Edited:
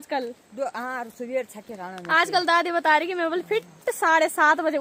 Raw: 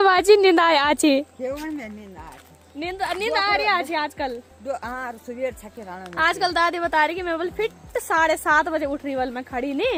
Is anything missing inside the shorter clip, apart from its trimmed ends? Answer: no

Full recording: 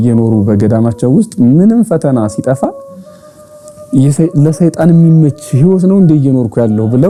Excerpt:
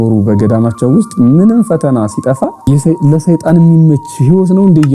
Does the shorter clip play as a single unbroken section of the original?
no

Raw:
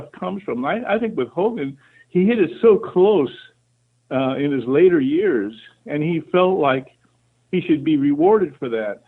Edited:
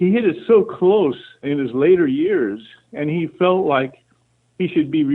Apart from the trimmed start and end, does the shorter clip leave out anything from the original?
yes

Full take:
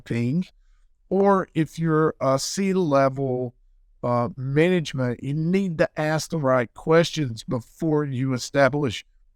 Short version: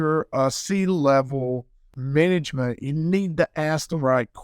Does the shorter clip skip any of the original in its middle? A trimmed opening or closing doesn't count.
yes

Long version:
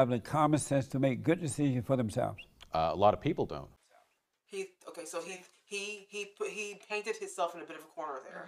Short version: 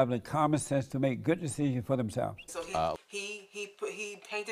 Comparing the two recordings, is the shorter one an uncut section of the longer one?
no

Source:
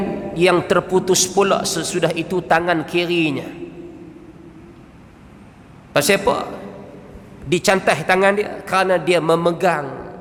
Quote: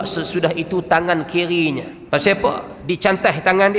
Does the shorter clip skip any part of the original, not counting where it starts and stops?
yes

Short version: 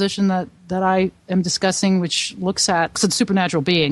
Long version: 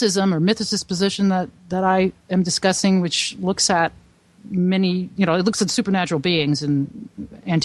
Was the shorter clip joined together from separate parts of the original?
yes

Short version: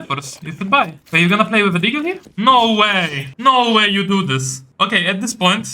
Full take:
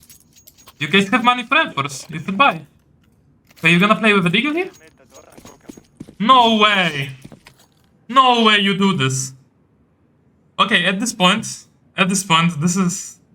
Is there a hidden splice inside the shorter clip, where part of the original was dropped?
yes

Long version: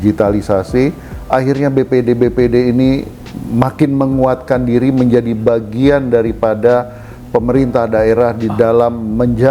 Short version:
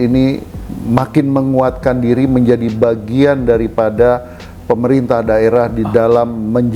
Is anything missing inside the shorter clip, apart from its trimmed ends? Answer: no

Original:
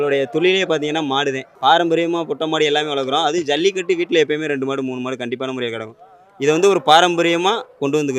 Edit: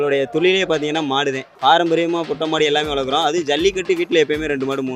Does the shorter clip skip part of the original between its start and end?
no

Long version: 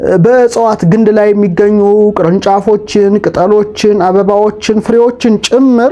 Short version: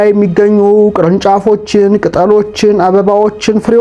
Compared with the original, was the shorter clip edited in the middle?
no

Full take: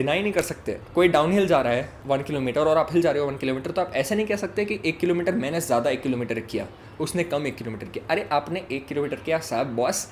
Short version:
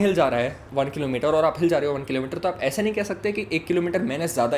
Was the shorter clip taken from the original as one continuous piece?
yes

